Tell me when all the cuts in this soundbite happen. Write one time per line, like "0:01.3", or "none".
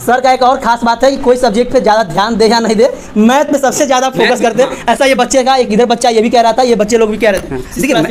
none